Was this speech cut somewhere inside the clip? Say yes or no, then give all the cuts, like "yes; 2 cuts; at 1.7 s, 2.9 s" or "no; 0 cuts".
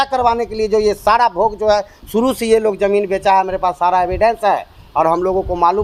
no; 0 cuts